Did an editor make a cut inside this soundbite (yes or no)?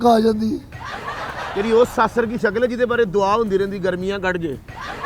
yes